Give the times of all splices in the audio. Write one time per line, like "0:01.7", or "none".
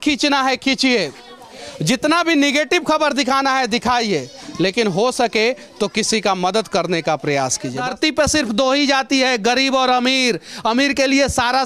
0:07.8